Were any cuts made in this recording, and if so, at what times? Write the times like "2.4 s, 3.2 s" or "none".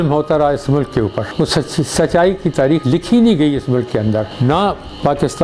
1.3 s

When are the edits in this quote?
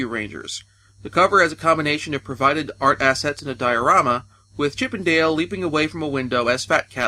none

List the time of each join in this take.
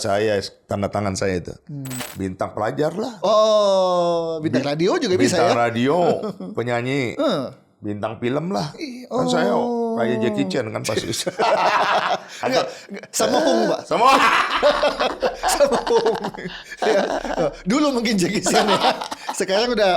2.1 s

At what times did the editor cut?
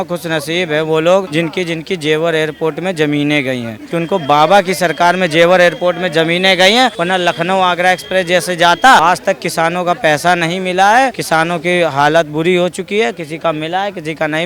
1.3 s, 3.8 s, 7.0 s, 9.0 s, 11.2 s

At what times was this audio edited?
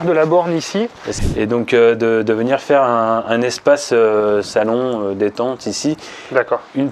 1.0 s

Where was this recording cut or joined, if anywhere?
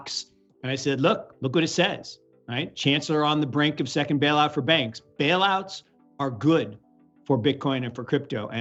none

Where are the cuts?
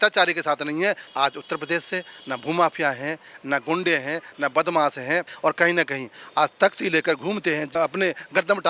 1.0 s, 5.3 s

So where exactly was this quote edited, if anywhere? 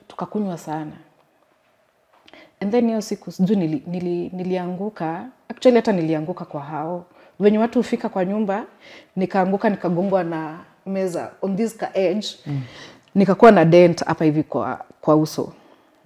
none

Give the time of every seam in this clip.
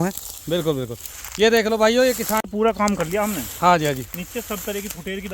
2.7 s

